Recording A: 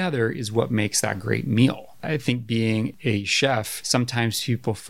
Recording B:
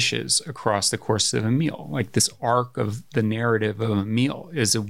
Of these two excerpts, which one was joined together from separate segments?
A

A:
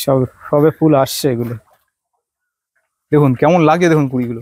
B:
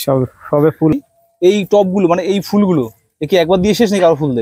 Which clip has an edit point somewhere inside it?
B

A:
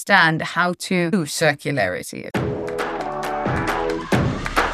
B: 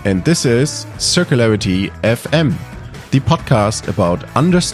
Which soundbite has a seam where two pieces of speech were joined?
A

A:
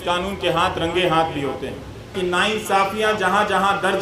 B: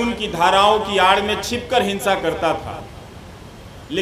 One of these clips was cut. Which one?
A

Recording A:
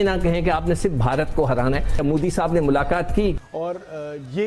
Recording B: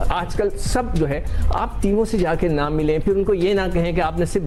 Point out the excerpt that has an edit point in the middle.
A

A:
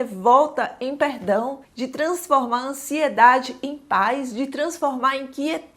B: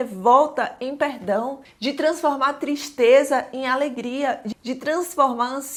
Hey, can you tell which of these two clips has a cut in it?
A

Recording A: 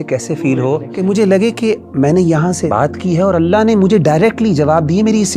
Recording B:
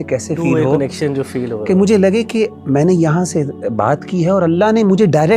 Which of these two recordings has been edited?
A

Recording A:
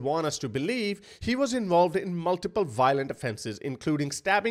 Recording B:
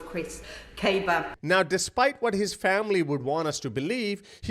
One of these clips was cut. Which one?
B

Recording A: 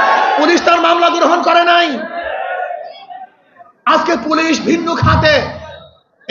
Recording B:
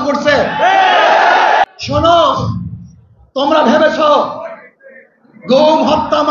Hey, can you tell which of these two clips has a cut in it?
B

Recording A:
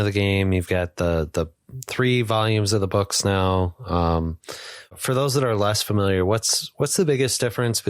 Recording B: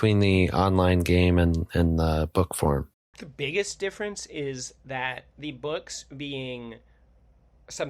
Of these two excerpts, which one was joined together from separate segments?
A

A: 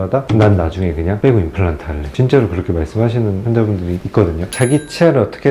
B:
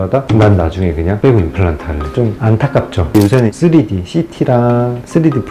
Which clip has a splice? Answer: B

